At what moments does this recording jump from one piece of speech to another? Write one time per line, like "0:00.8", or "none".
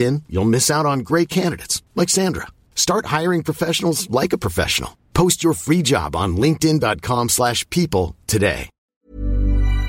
0:08.9